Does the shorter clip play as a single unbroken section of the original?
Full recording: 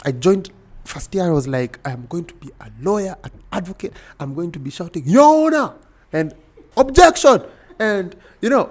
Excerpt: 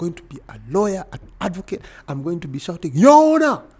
yes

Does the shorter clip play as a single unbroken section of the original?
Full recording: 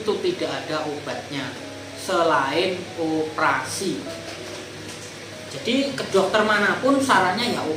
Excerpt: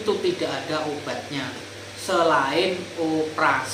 yes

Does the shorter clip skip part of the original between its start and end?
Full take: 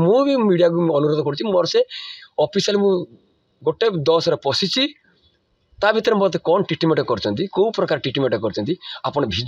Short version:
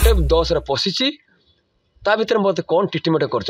no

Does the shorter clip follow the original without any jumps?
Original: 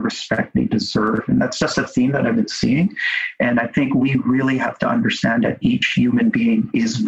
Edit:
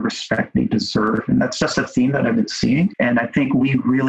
no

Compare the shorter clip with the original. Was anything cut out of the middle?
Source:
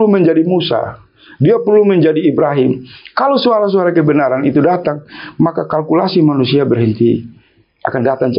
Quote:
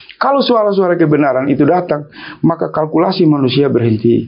no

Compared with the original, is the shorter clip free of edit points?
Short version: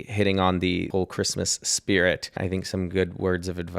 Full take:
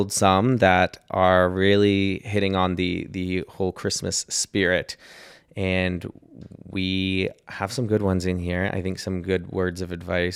no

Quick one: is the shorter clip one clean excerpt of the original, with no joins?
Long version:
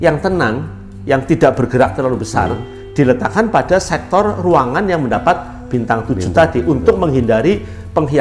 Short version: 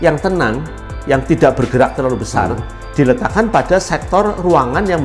yes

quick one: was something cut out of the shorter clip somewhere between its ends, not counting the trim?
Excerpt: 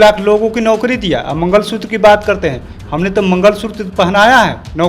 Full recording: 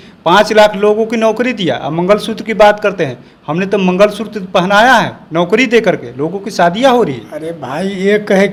no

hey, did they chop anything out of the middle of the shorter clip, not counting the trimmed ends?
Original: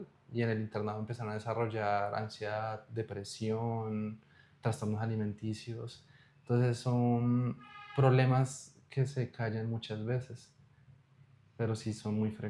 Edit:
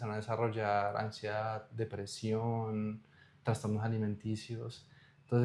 no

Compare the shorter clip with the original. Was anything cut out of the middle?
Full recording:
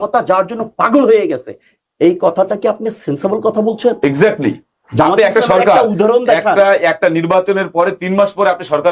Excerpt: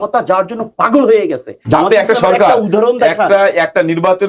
yes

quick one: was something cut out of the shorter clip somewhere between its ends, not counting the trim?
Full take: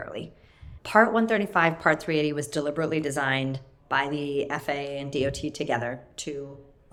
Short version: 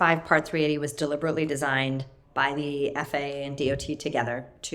no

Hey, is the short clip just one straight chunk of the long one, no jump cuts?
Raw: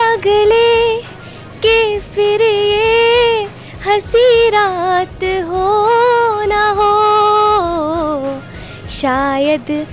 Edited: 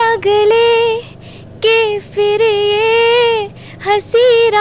yes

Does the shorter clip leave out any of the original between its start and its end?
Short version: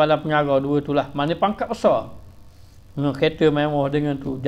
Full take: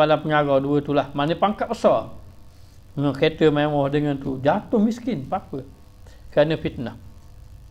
no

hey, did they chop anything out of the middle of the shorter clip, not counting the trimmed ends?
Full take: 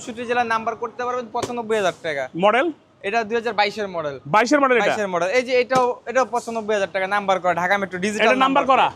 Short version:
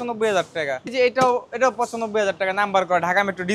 yes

